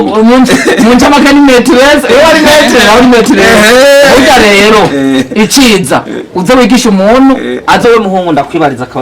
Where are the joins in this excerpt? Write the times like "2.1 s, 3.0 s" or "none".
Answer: 7.4 s